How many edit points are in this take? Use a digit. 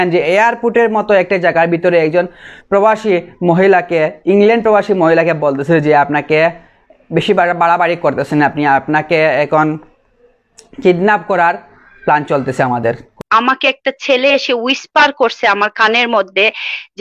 1